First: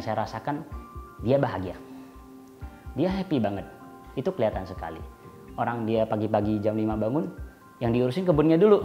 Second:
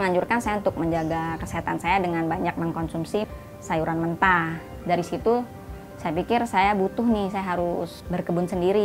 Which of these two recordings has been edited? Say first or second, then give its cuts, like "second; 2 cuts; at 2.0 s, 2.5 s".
second; 3 cuts; at 3.2 s, 4.7 s, 8.0 s